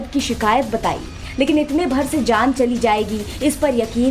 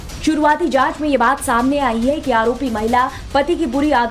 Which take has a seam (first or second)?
first